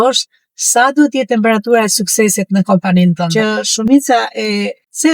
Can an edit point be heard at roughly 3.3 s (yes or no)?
yes